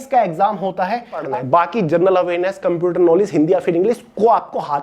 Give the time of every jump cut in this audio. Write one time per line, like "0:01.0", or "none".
0:01.2